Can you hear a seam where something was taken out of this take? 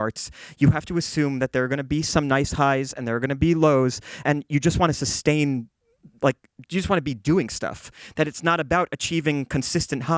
yes; 1 cut; at 4.1 s

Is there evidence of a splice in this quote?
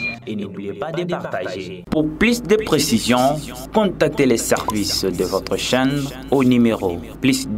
no; 0 cuts

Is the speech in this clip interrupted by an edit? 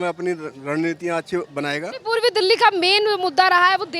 no; 0 cuts

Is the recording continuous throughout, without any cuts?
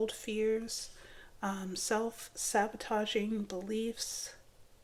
yes; 0 cuts

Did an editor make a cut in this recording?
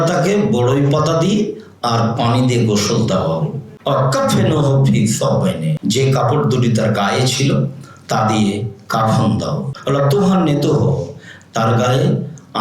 yes; 3 cuts; at 3.6 s, 5.7 s, 9.7 s

